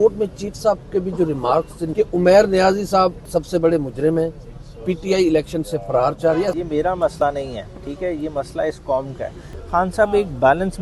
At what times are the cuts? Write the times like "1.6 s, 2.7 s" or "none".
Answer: 1.8 s, 3.2 s, 6.5 s, 9.5 s